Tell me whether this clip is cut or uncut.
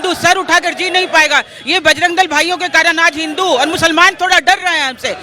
uncut